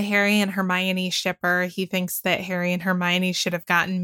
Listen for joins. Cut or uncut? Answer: uncut